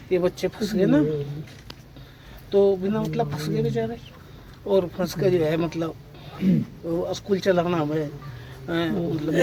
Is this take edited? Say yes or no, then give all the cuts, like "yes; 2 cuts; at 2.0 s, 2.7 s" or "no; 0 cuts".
no; 0 cuts